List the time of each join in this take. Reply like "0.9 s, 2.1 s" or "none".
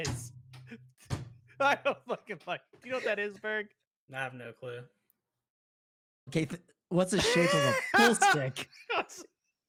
none